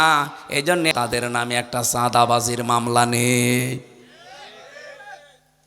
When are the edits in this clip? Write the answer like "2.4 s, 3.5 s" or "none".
0.9 s